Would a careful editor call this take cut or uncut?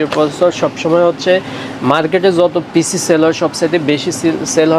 uncut